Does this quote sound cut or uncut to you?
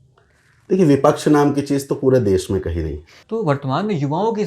cut